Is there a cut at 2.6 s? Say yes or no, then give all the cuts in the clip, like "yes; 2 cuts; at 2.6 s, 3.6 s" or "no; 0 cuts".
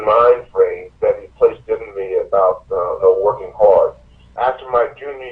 no; 2 cuts; at 0.9 s, 4.3 s